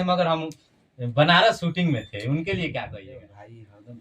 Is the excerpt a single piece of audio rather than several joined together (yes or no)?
no